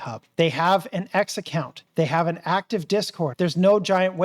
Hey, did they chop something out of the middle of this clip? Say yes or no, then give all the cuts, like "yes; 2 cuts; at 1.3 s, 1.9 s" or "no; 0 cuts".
yes; 2 cuts; at 1.8 s, 3.3 s